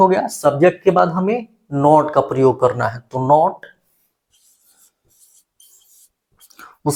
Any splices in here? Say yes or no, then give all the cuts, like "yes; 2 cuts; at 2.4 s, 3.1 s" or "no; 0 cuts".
no; 0 cuts